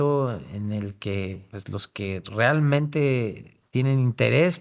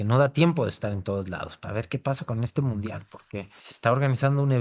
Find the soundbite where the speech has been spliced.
second; 2 cuts; at 1.6 s, 3.6 s

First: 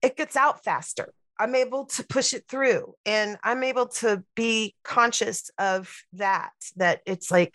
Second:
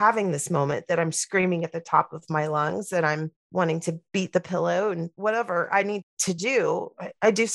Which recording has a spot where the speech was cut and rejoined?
second; 2 cuts; at 4.0 s, 6.2 s

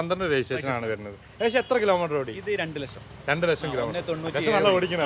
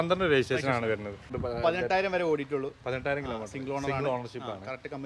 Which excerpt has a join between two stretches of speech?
second; 1 cut; at 1.3 s

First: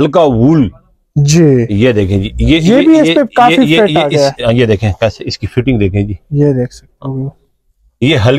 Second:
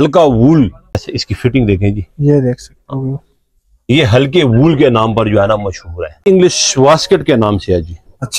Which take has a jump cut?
second; 2 cuts; at 1.1 s, 6.2 s

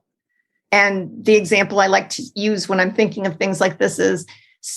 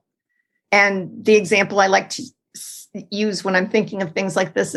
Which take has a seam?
first; 1 cut; at 2.2 s

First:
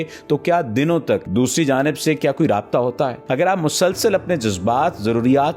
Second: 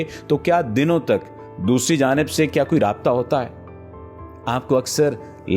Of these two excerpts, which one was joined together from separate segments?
first; 2 cuts; at 1.3 s, 3.2 s

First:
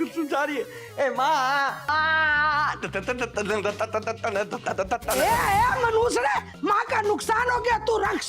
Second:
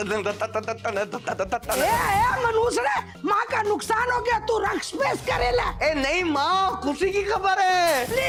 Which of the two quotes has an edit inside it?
first; 1 cut; at 1.9 s

